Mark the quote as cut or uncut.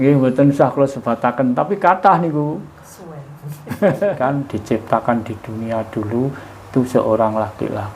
cut